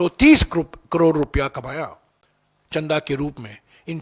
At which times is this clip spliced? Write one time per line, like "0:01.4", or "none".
none